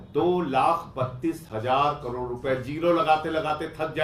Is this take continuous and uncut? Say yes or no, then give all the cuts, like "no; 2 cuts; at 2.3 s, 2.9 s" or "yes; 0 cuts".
yes; 0 cuts